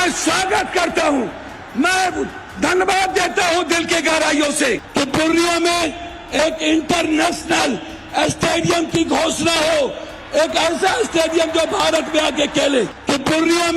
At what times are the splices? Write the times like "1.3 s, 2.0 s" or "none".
4.9 s, 13.0 s